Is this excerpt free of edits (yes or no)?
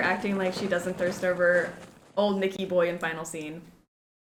yes